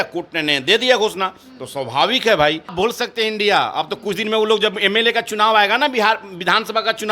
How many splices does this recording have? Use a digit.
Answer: 1